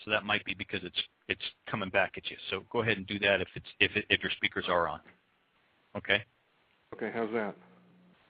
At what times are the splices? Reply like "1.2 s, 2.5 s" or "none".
7.0 s